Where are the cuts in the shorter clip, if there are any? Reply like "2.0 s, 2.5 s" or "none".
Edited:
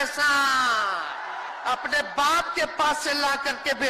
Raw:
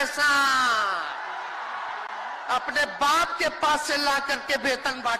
1.5 s